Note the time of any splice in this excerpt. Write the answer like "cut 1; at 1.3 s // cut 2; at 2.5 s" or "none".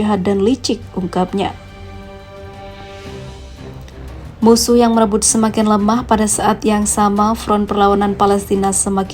none